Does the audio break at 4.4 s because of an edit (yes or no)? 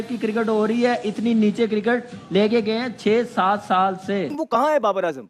yes